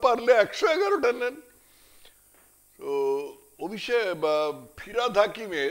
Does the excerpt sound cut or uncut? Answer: uncut